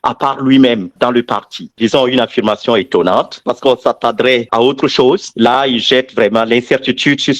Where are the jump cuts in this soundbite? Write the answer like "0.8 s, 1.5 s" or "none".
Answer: 1.8 s